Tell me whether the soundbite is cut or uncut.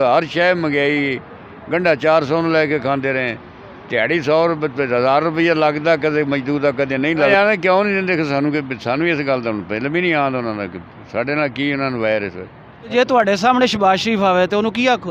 cut